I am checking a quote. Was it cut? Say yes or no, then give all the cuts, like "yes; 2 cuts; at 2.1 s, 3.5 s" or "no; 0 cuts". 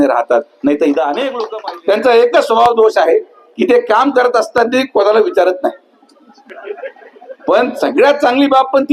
yes; 1 cut; at 1.4 s